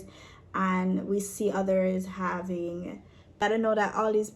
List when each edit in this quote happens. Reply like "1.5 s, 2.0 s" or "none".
3.4 s